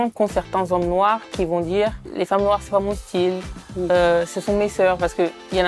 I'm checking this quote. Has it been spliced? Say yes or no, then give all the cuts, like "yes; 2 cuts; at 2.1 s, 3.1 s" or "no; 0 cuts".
yes; 1 cut; at 2.0 s